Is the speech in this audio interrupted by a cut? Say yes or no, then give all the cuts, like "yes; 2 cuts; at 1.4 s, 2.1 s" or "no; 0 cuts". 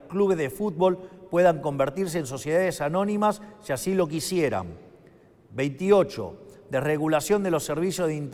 no; 0 cuts